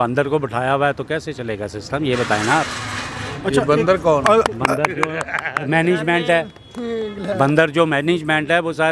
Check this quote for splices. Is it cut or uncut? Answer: uncut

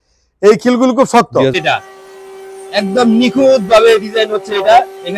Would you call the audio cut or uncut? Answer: cut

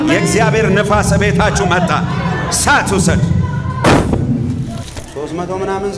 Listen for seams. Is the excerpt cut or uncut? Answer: cut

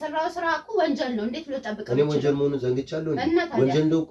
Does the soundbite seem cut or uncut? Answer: uncut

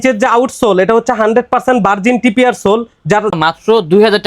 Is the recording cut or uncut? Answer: cut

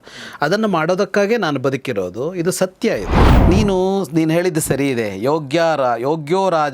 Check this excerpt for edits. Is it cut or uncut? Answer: cut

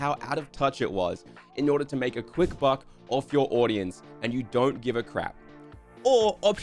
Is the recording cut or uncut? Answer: uncut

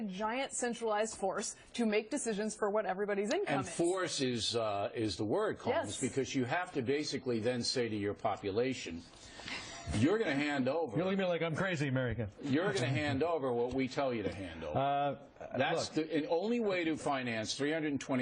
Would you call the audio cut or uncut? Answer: uncut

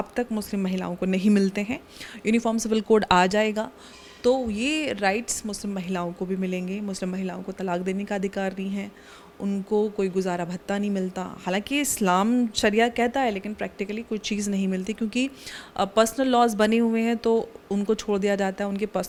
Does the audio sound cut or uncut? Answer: uncut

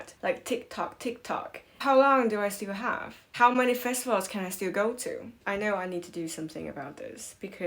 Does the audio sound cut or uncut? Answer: uncut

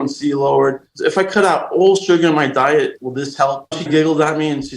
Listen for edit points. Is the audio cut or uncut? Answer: cut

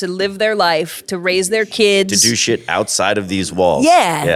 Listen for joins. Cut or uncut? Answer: uncut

